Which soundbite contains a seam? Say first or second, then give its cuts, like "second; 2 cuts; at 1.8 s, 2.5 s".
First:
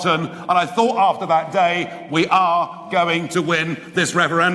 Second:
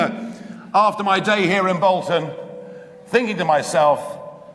first; 1 cut; at 3.1 s